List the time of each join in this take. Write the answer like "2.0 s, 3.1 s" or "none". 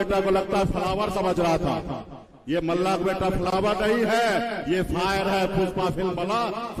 none